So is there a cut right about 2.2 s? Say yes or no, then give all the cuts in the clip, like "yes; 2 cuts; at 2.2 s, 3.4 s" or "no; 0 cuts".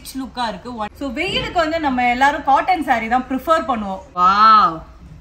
no; 2 cuts; at 0.9 s, 4.0 s